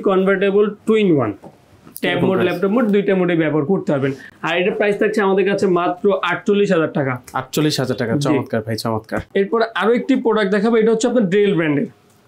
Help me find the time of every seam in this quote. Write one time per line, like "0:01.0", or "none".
none